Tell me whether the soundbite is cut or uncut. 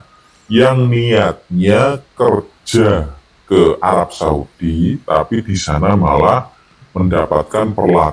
uncut